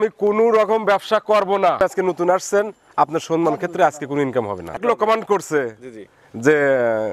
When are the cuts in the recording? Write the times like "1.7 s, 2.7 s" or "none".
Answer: 1.8 s, 4.8 s